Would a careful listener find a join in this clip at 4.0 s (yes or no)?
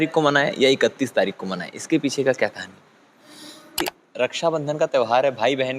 yes